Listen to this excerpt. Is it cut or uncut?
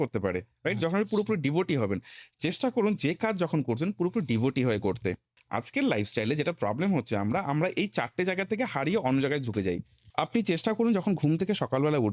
cut